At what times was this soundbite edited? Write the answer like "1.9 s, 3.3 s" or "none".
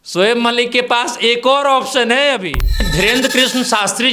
2.9 s